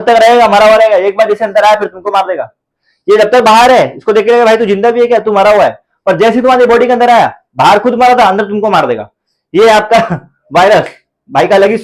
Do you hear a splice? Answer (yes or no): no